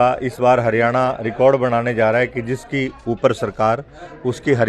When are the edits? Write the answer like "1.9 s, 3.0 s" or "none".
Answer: none